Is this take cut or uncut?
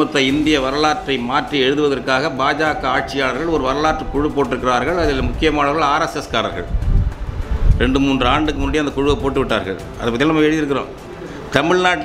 uncut